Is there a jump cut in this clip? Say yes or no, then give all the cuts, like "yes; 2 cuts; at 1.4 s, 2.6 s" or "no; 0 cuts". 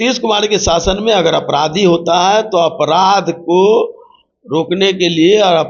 no; 0 cuts